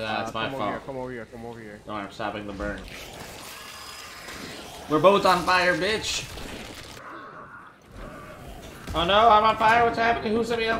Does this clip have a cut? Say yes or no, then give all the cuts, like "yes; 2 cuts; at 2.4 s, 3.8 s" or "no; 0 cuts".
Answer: yes; 2 cuts; at 2.9 s, 7.0 s